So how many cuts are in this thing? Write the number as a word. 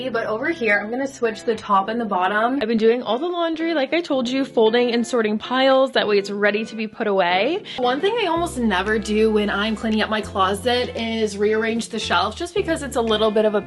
two